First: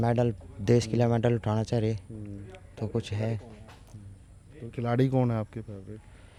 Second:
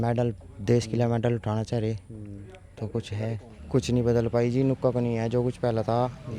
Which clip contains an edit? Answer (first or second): second